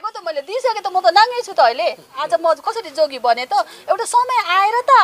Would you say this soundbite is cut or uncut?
cut